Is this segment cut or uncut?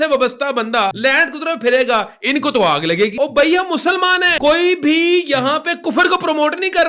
cut